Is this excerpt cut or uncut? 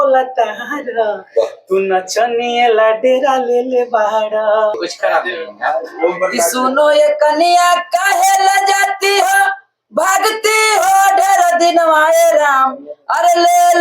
cut